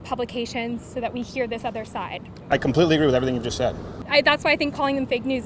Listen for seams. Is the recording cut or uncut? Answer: cut